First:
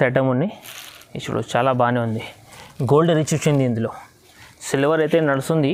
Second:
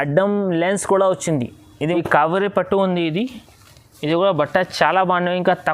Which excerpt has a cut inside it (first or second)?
second